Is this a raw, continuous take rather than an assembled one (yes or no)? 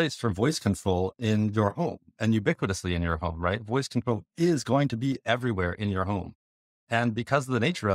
yes